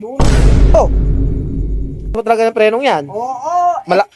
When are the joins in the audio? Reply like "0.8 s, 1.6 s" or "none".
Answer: 2.1 s